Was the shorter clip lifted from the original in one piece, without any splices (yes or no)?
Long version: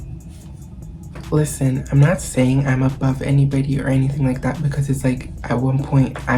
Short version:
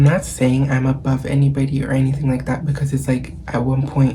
yes